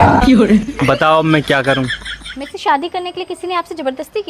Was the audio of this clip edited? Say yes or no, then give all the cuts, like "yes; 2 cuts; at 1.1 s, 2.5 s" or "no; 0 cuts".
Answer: yes; 1 cut; at 2.1 s